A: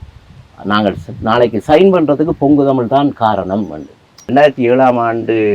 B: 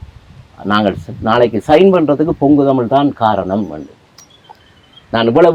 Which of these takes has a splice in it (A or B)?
A